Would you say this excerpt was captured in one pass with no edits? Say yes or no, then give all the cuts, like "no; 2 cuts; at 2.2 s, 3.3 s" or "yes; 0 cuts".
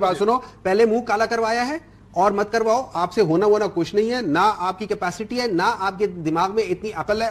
yes; 0 cuts